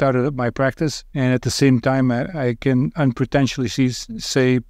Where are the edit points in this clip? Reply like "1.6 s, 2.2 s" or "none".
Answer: 1.0 s